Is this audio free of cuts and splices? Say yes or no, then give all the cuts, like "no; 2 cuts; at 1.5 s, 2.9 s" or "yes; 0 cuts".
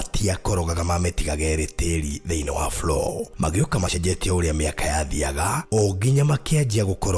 no; 1 cut; at 3.9 s